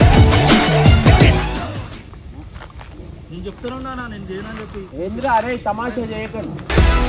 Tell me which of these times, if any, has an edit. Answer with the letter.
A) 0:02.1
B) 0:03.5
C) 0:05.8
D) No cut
A